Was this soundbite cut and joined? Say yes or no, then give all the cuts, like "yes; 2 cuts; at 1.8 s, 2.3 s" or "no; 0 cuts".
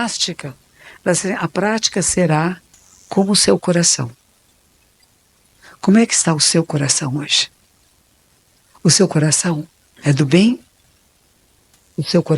no; 0 cuts